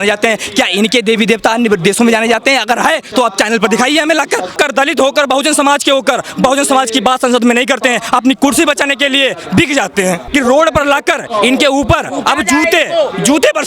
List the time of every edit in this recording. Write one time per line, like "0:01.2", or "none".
0:04.5
0:10.2